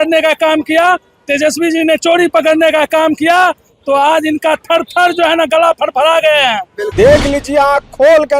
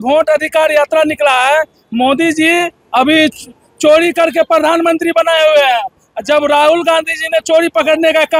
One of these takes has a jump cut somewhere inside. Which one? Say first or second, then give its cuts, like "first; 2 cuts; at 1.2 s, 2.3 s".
first; 1 cut; at 6.8 s